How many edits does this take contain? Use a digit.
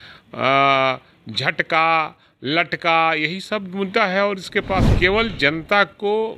1